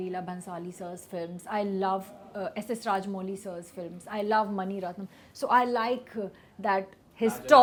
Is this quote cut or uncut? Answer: uncut